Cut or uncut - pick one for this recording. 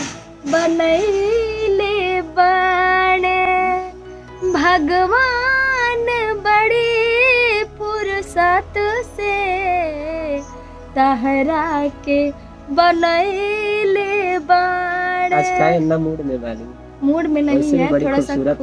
uncut